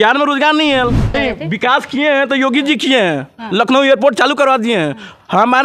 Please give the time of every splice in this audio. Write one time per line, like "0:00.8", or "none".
0:01.1

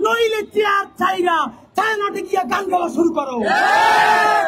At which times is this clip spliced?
none

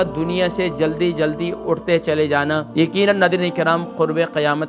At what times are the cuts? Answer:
0:02.7

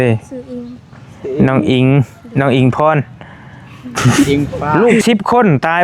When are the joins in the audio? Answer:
0:04.7

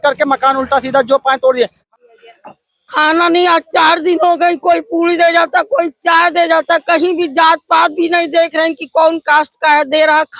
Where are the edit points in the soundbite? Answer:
0:01.9

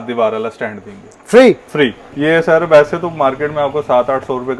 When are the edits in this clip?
0:02.1

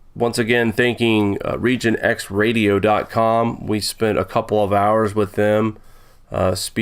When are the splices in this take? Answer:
0:01.2

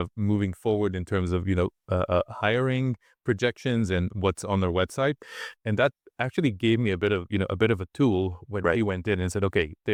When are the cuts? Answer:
none

